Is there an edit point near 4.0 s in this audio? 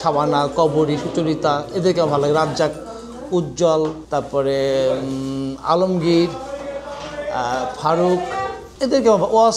yes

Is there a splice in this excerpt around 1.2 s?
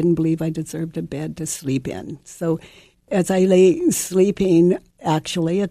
no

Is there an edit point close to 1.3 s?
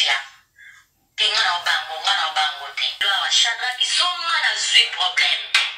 no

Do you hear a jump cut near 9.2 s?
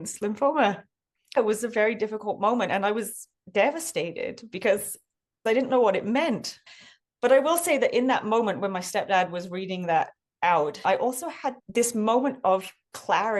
no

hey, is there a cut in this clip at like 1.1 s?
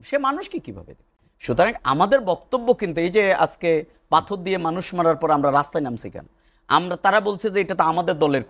no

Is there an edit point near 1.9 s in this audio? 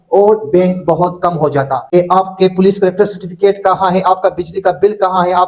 yes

